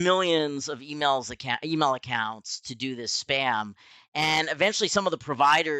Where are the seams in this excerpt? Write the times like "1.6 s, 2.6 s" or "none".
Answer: none